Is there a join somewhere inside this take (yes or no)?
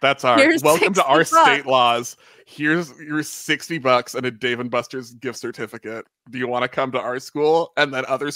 no